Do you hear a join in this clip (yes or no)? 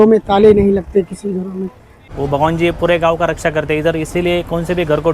yes